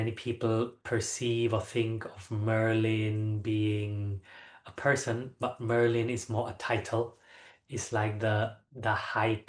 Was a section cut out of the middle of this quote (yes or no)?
no